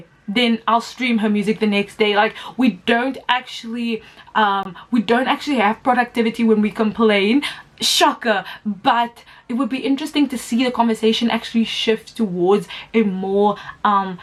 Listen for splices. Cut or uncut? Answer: uncut